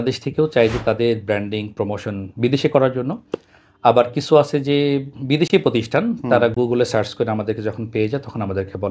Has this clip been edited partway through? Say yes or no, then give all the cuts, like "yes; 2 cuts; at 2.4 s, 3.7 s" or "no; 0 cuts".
no; 0 cuts